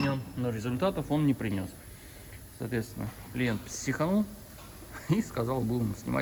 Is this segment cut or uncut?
uncut